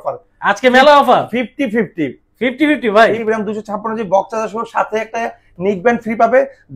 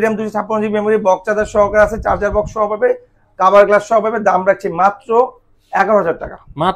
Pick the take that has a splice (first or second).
first